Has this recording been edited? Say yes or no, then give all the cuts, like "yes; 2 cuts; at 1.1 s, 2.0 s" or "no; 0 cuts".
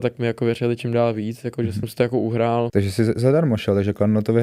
yes; 1 cut; at 2.7 s